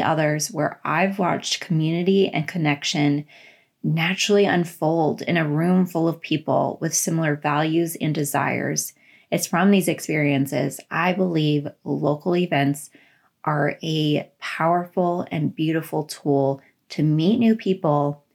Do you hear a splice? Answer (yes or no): no